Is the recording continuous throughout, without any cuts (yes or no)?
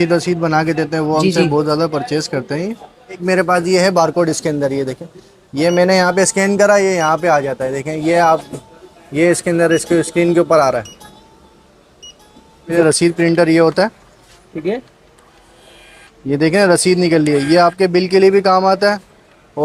no